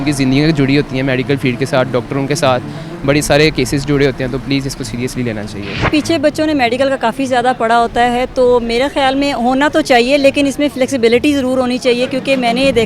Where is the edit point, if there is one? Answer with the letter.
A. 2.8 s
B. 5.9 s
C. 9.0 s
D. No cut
B